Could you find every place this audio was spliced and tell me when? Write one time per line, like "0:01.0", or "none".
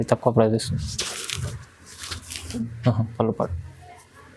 0:02.6